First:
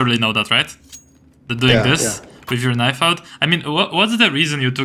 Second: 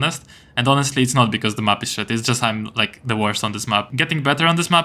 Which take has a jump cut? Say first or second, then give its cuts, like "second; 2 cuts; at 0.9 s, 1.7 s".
second; 1 cut; at 3.9 s